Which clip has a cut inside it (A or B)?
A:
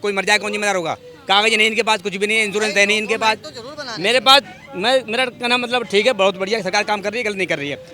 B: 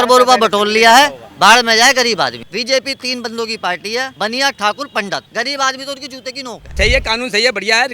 B